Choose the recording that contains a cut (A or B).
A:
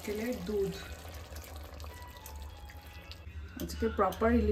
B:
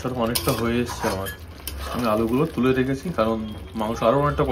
A